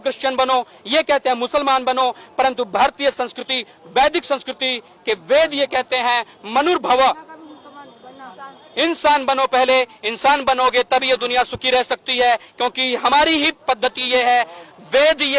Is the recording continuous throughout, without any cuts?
yes; 0 cuts

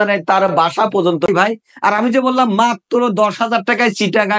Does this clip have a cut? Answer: yes; 1 cut; at 1.3 s

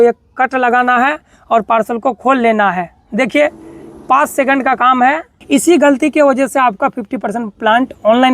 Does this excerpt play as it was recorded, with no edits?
no; 1 cut; at 5.3 s

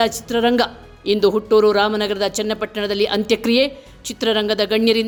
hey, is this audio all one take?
yes; 0 cuts

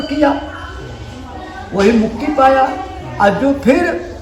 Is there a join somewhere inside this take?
no; 0 cuts

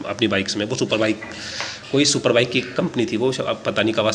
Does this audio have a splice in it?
no; 0 cuts

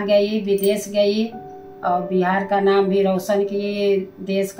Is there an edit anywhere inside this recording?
no; 0 cuts

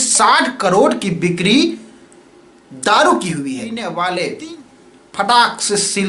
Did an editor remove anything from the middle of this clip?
yes; 1 cut; at 3.7 s

